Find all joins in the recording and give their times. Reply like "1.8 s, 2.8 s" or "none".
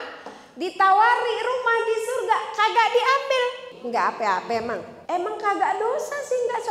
3.7 s, 4.9 s